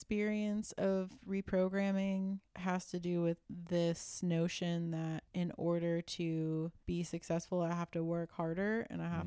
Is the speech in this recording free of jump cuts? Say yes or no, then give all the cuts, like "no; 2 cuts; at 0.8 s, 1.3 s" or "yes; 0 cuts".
no; 4 cuts; at 2.5 s, 3.4 s, 5.2 s, 6.8 s